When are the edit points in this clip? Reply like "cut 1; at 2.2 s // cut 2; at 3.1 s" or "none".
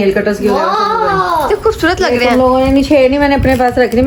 none